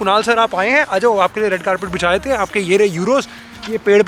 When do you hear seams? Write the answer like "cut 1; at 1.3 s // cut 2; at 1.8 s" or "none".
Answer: none